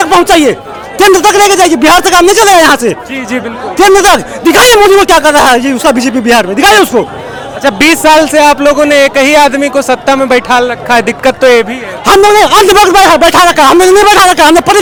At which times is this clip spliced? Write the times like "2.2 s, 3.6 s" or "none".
none